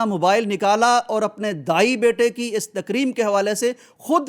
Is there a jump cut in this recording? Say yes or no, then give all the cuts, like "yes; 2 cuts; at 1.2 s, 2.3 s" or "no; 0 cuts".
no; 0 cuts